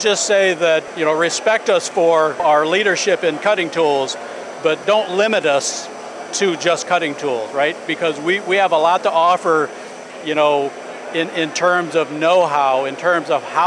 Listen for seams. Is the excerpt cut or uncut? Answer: cut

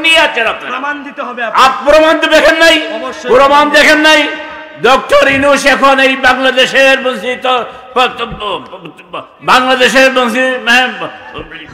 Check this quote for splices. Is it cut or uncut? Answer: uncut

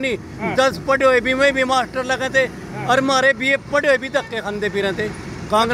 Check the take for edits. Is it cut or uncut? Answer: uncut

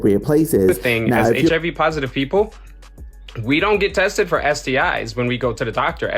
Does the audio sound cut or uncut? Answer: cut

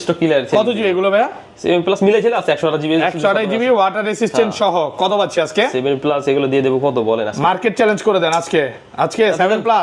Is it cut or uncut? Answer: uncut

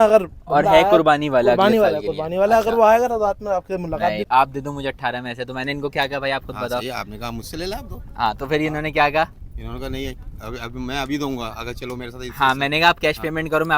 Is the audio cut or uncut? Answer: cut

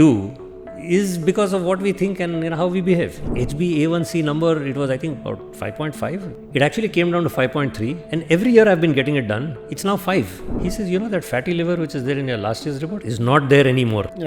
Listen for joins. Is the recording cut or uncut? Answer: cut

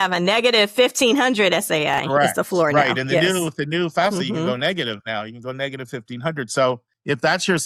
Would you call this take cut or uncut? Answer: uncut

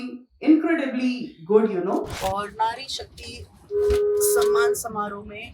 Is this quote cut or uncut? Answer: cut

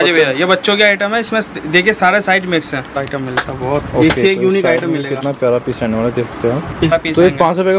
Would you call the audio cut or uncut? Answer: cut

